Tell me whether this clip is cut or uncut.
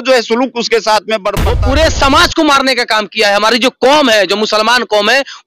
cut